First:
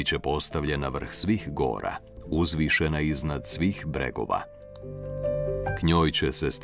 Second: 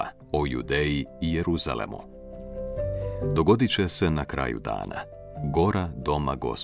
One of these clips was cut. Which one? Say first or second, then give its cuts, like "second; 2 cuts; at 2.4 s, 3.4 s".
second; 2 cuts; at 2.3 s, 3.4 s